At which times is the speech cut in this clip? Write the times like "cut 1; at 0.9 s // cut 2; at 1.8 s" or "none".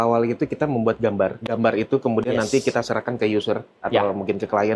cut 1; at 1.4 s